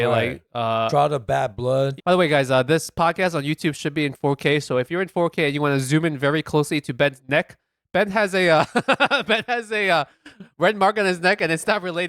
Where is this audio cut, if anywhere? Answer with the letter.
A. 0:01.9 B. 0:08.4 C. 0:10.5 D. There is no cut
A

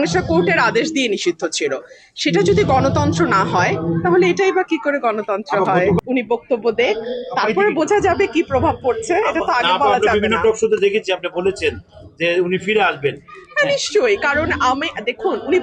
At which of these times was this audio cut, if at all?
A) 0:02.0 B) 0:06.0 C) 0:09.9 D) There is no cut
B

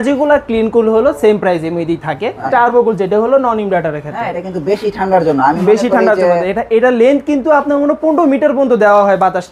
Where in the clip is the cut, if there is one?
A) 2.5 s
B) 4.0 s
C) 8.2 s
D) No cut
A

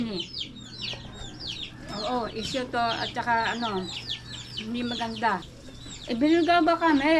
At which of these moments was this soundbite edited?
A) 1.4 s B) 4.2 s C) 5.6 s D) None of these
C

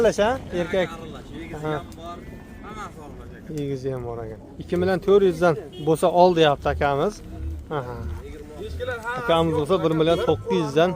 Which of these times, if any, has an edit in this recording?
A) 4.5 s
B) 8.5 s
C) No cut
A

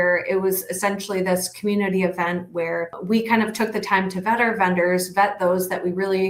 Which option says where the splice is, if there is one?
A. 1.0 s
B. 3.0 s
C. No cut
B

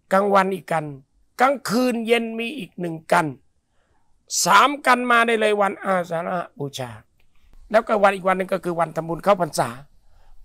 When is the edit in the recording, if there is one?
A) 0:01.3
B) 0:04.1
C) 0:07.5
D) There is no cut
C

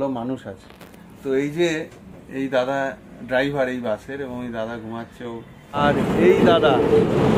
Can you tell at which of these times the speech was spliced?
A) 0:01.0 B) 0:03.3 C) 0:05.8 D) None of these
C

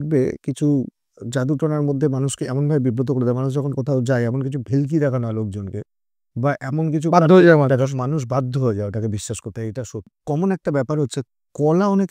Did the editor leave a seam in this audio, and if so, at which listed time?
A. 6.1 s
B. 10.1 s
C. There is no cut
B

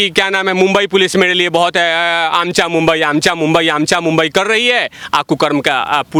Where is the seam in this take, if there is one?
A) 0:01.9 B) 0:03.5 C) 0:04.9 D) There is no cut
D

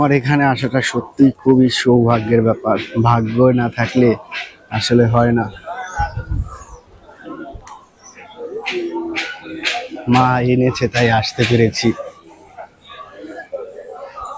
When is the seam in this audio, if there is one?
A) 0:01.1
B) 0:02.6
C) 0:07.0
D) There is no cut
D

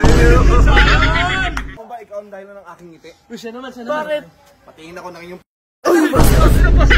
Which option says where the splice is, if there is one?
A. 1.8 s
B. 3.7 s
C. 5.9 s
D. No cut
A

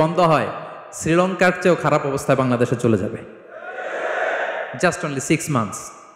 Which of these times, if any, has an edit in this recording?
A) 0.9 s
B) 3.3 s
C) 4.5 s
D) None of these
D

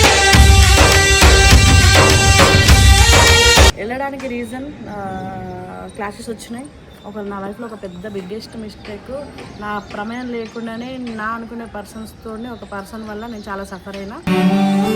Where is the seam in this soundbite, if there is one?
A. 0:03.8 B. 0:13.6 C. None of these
A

